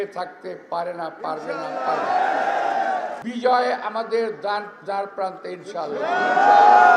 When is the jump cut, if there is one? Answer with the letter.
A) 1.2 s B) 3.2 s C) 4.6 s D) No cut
B